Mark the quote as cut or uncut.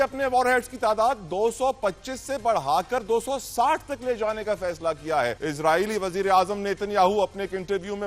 cut